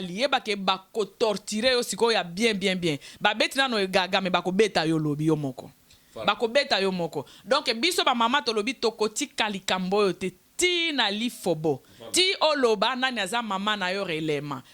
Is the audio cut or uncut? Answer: uncut